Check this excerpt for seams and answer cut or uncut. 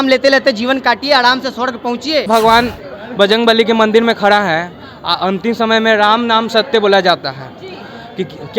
cut